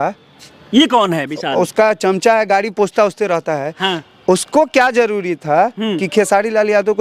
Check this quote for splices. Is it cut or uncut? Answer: uncut